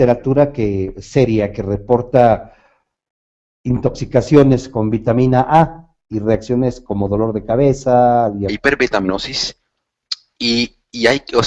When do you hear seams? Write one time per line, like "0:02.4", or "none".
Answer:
none